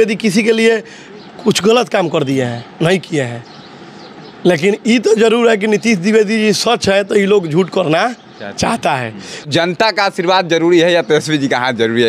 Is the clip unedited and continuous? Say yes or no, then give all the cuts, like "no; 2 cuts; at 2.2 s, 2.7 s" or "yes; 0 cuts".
no; 1 cut; at 9.5 s